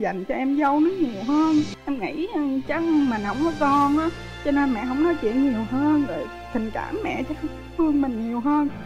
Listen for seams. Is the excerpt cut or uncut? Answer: cut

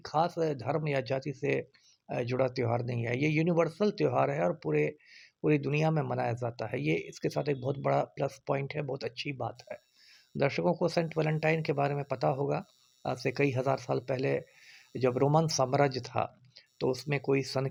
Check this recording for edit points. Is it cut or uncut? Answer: uncut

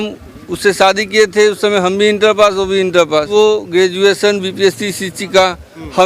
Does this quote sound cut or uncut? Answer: cut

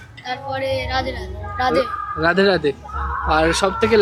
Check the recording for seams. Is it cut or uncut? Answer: uncut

